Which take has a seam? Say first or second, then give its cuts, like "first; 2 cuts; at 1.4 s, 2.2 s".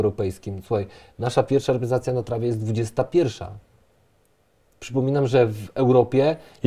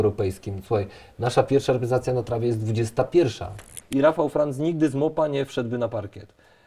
second; 1 cut; at 3.8 s